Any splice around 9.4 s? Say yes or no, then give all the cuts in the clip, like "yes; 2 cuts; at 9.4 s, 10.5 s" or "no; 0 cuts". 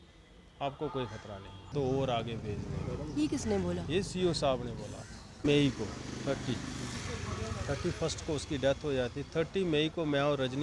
no; 2 cuts; at 1.7 s, 5.4 s